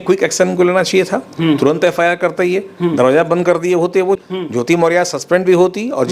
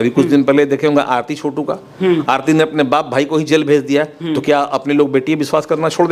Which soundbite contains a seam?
first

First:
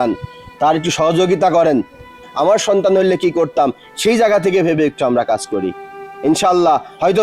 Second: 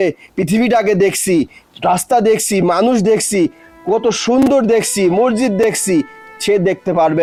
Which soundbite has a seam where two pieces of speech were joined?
first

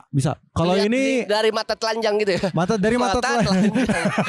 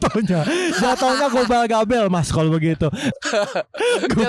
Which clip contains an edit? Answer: second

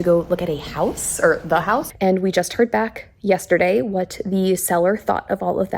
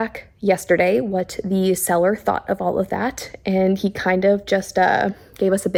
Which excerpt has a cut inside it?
first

